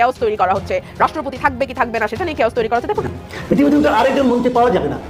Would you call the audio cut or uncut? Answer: cut